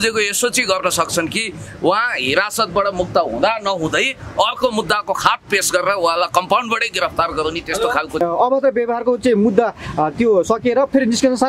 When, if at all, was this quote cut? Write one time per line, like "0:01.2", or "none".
0:08.2